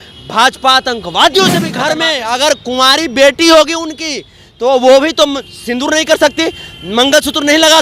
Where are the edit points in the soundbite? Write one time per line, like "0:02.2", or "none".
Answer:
0:01.7